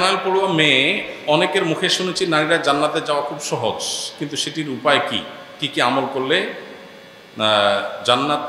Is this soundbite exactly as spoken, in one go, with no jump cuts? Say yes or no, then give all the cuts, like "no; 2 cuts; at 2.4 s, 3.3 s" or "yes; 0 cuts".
yes; 0 cuts